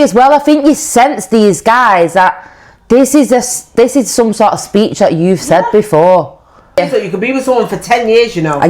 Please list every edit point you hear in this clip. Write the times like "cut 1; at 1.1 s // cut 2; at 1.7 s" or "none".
cut 1; at 6.8 s